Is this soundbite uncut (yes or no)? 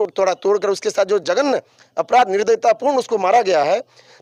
yes